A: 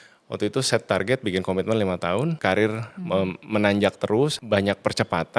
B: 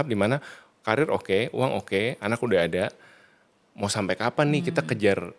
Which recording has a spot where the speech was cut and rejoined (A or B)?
A